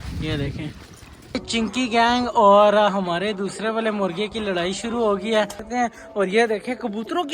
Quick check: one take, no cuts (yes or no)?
no